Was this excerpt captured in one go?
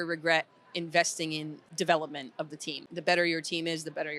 no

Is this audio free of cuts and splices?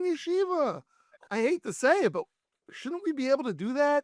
no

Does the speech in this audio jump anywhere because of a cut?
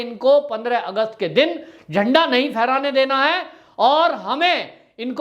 no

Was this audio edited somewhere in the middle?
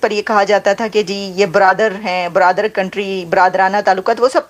no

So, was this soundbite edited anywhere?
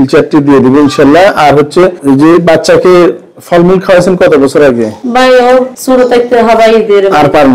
yes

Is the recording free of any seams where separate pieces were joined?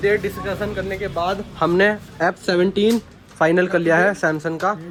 yes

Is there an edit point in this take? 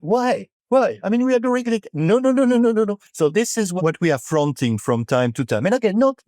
yes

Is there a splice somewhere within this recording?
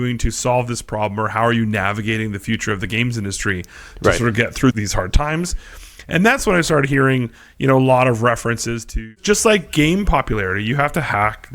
yes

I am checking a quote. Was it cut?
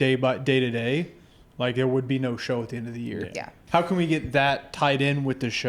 yes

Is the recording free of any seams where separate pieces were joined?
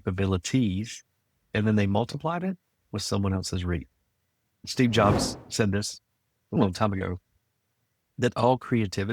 no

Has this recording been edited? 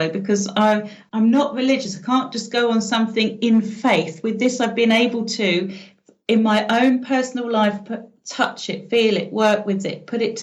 yes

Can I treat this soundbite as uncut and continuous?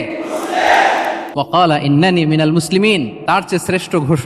no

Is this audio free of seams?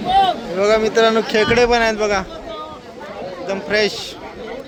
yes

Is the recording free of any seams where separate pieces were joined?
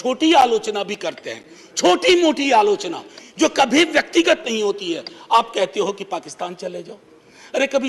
yes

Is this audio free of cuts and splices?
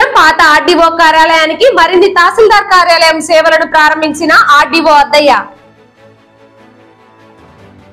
yes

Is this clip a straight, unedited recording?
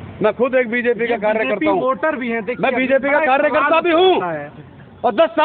yes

